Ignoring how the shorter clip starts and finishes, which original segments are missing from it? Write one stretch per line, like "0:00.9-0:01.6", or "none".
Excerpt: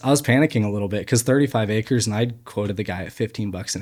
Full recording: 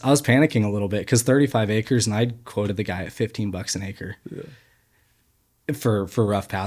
none